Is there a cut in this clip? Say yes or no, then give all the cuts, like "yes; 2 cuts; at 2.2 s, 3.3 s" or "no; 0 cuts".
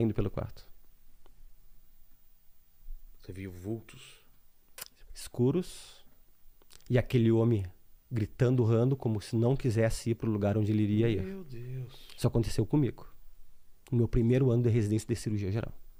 no; 0 cuts